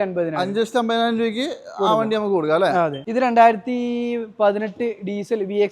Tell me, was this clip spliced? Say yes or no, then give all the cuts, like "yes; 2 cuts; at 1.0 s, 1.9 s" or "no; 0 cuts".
yes; 1 cut; at 3.0 s